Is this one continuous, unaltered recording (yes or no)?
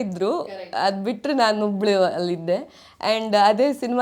yes